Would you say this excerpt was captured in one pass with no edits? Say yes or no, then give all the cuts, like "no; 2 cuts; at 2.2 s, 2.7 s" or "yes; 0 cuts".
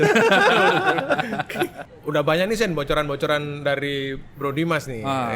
yes; 0 cuts